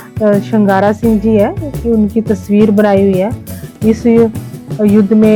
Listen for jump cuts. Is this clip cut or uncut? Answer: uncut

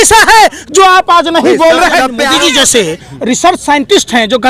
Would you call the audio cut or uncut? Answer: cut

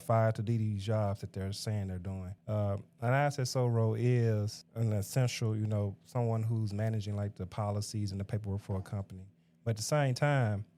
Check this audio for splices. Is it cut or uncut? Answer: cut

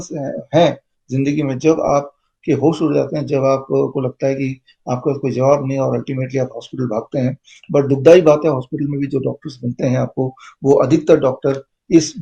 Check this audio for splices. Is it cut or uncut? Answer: uncut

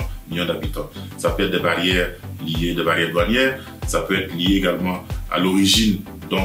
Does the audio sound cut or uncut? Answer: uncut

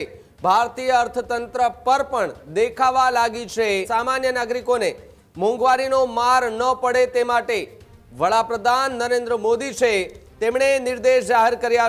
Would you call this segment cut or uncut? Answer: cut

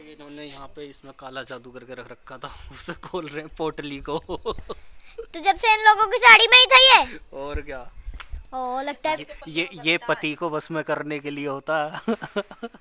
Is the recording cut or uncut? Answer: uncut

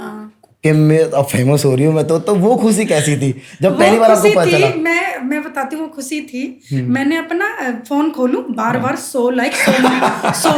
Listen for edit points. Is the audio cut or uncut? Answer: uncut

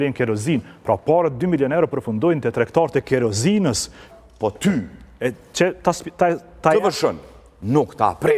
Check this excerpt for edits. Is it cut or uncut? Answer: cut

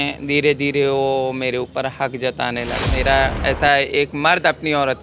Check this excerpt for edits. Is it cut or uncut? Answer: cut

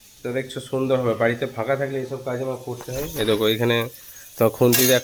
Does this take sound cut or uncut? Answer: uncut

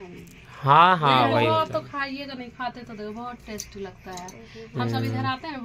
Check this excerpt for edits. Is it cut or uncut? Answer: uncut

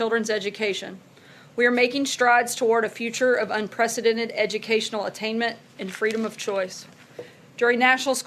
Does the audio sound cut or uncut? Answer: uncut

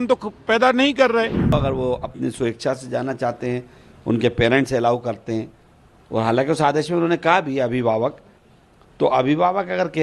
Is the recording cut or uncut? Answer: cut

